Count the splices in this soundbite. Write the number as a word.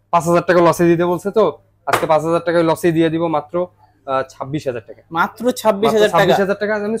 zero